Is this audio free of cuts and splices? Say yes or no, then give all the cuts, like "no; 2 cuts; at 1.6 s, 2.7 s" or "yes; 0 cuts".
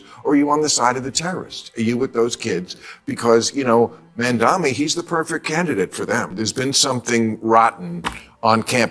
no; 1 cut; at 6.4 s